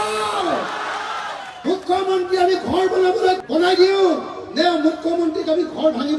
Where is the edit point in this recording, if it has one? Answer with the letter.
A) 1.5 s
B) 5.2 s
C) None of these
A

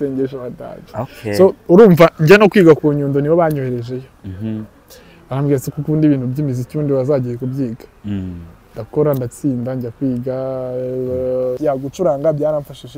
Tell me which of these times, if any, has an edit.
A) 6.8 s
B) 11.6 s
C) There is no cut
B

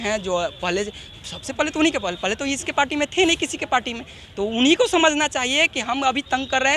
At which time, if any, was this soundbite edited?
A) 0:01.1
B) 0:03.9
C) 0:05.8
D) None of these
D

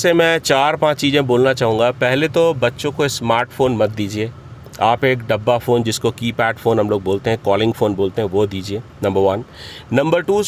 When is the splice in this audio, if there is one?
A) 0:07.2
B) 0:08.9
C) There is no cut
C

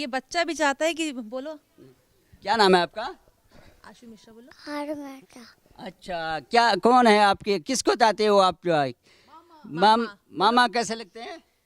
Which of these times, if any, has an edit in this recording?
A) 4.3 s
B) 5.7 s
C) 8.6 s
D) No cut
D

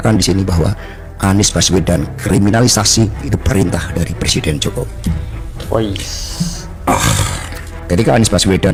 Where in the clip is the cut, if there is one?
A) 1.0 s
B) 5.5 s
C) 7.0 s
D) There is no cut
D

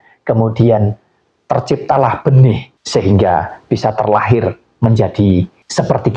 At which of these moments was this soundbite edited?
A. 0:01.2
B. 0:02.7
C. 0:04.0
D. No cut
B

